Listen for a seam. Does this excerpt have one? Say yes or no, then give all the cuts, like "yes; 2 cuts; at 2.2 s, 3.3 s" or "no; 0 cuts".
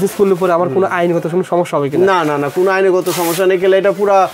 no; 0 cuts